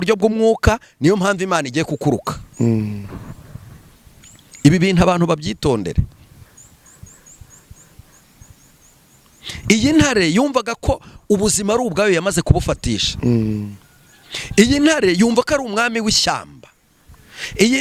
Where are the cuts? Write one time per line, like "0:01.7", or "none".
none